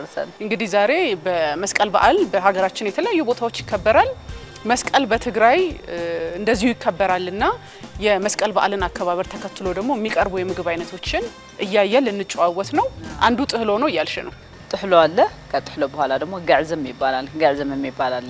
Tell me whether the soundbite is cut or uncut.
uncut